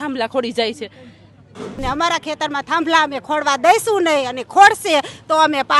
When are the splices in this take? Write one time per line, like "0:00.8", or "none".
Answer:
0:01.8